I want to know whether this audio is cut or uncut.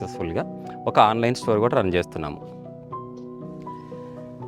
uncut